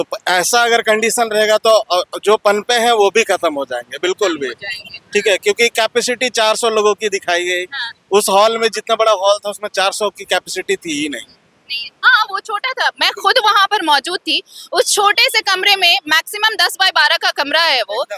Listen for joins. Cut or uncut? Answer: uncut